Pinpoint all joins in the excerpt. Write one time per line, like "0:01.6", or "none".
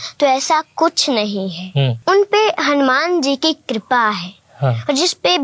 0:02.0